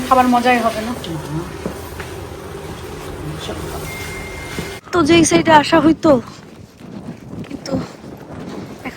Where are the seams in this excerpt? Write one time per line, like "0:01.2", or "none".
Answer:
0:04.8